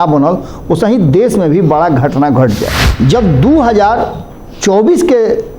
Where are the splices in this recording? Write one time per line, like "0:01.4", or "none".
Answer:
0:02.8